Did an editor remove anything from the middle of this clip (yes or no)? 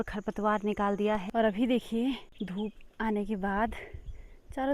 yes